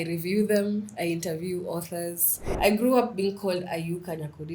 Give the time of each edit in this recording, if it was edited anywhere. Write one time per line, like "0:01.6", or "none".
0:02.5